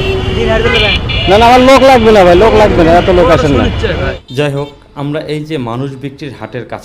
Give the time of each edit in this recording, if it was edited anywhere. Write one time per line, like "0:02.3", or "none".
0:04.2